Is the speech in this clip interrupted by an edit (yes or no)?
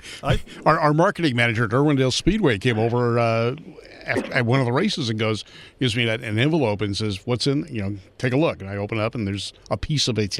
no